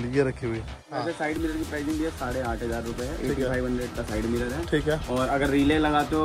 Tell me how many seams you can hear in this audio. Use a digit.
1